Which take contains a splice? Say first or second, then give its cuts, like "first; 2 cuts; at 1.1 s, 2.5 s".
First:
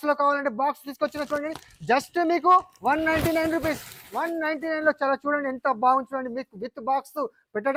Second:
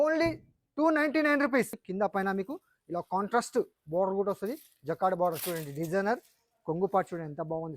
second; 1 cut; at 1.8 s